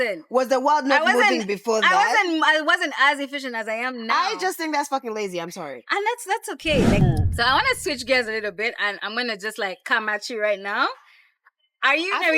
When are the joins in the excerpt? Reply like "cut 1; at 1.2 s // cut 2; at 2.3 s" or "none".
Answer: cut 1; at 7.0 s